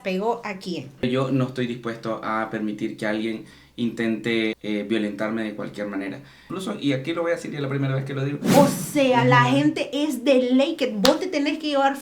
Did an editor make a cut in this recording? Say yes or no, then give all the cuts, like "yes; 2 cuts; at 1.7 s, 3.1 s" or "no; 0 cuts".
yes; 4 cuts; at 1.0 s, 4.6 s, 6.5 s, 8.4 s